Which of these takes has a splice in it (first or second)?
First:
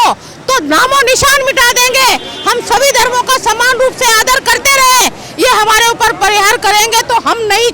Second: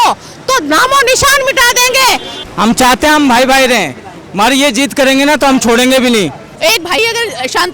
second